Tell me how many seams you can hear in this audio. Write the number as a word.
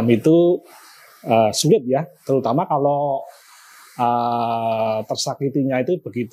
zero